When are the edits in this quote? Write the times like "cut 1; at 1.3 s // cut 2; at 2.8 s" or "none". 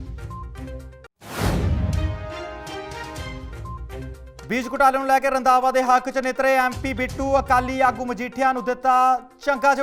cut 1; at 1.1 s // cut 2; at 4.3 s